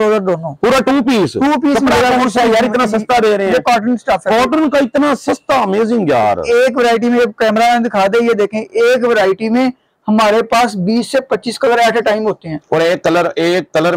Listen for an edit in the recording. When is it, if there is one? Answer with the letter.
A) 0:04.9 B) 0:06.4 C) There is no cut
B